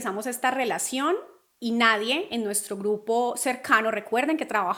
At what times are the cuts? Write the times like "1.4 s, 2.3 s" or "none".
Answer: none